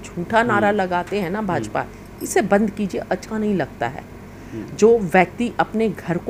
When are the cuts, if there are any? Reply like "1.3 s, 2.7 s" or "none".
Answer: none

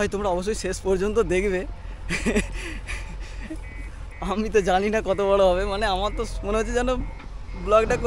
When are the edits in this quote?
none

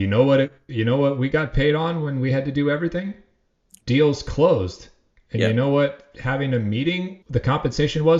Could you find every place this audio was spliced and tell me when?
7.2 s

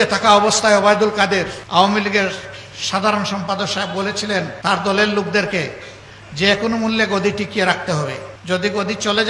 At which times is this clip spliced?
1.6 s, 4.5 s, 8.3 s

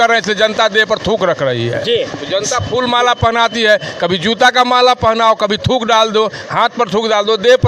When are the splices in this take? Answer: none

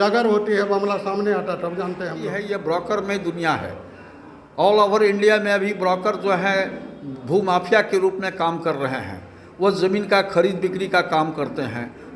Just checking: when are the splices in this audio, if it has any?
2.4 s

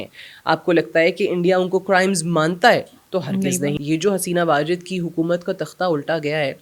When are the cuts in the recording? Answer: 3.8 s

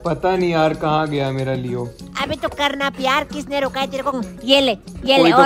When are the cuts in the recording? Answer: 4.2 s

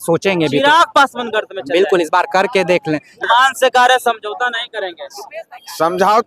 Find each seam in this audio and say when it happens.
3.2 s

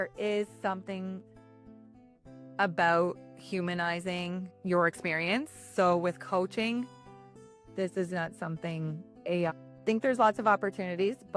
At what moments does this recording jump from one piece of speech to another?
none

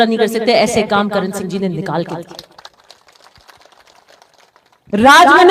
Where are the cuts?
none

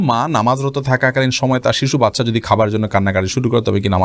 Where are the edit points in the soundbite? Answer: none

